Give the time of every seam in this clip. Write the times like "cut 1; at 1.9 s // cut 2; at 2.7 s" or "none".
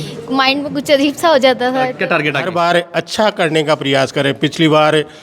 cut 1; at 1.9 s